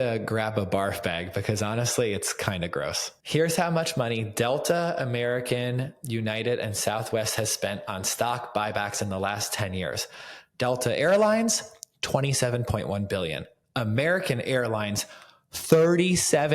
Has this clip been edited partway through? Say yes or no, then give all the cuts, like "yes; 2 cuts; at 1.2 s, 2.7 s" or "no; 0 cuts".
yes; 1 cut; at 3.1 s